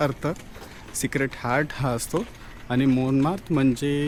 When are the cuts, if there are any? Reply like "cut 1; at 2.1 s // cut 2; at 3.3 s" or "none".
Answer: none